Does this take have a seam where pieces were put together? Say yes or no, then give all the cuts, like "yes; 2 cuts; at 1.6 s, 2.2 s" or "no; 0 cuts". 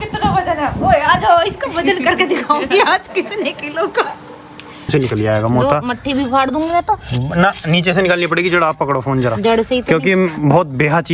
yes; 1 cut; at 4.9 s